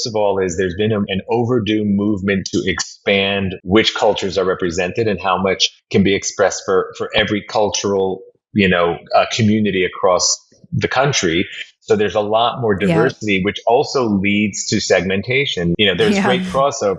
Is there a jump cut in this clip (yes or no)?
yes